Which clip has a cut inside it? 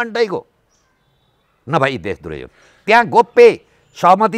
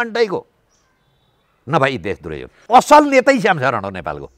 second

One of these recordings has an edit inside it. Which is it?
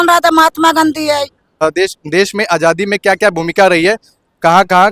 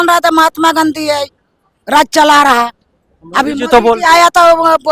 first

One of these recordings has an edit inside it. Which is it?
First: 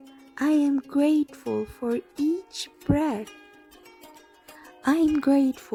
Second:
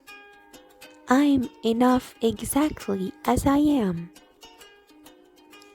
second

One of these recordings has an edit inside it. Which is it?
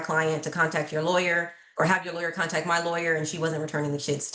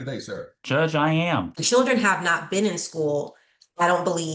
second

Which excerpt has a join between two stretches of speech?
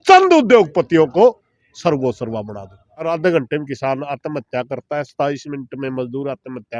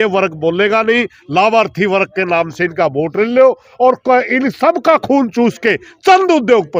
first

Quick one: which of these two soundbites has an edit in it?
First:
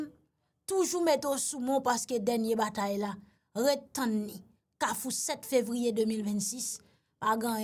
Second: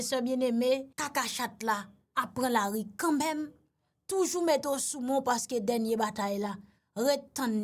second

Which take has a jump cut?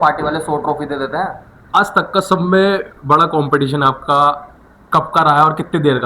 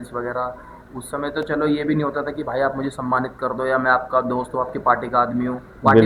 first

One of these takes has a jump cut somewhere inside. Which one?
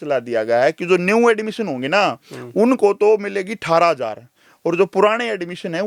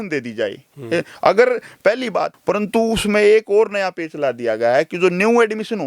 second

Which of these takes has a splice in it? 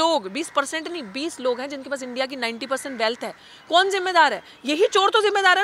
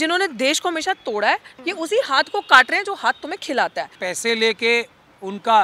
second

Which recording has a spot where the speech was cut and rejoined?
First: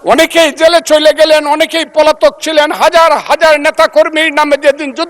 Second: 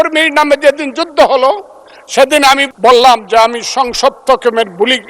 second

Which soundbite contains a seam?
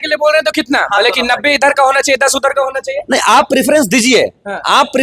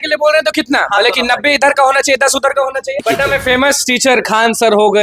second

